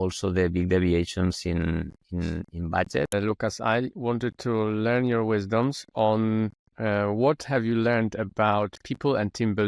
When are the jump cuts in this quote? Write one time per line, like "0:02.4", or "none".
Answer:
0:03.1